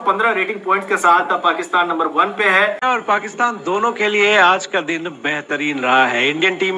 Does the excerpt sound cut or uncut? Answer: cut